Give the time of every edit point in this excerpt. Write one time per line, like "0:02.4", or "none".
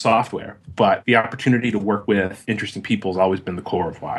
0:01.0
0:02.2